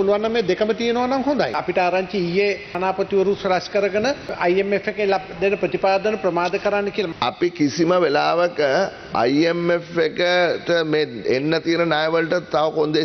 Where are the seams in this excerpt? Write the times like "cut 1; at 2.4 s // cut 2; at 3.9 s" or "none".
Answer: cut 1; at 1.6 s // cut 2; at 2.8 s // cut 3; at 4.3 s // cut 4; at 7.1 s